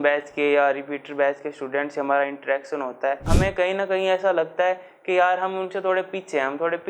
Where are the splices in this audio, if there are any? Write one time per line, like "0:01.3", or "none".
0:03.3